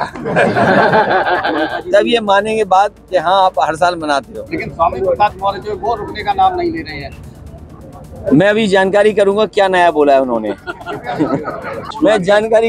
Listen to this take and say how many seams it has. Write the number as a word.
two